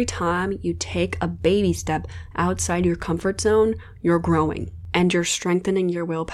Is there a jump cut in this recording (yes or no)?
no